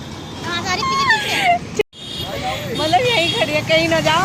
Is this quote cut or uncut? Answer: uncut